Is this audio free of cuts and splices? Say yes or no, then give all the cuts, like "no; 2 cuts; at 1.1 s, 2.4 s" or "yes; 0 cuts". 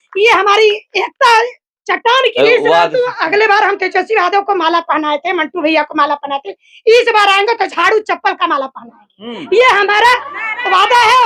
no; 1 cut; at 2.3 s